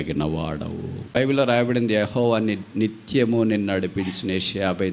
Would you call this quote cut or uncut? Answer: cut